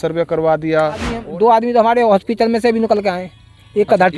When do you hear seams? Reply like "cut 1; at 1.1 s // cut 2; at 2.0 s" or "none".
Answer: cut 1; at 1.1 s